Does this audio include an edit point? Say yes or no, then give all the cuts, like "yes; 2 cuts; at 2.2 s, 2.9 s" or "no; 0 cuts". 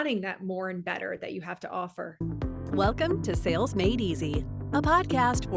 yes; 1 cut; at 2.6 s